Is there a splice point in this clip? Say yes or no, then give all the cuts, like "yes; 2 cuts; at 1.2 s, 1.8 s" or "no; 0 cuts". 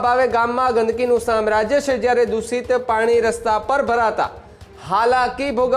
no; 0 cuts